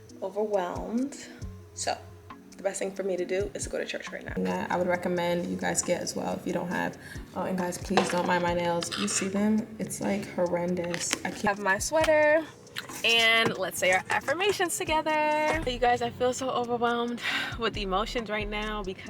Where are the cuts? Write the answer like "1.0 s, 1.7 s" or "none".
4.4 s, 11.4 s, 15.7 s